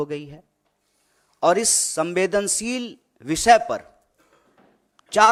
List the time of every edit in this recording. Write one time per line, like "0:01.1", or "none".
none